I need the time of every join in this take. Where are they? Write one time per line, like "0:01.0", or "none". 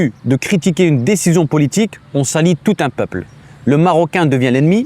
none